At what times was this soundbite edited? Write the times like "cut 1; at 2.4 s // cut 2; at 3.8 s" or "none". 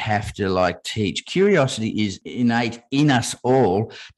cut 1; at 2.2 s